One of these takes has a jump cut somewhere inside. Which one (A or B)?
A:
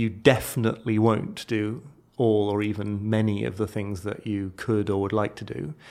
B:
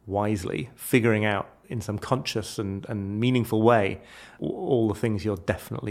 B